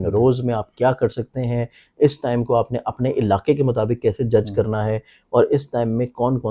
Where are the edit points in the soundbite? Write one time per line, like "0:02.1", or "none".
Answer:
none